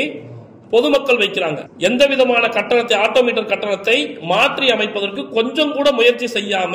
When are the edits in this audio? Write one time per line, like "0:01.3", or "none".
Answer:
0:01.7